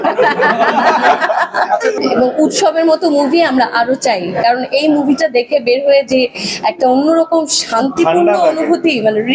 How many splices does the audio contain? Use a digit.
1